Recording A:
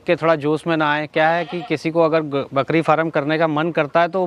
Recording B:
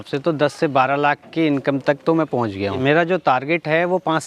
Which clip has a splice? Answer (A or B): B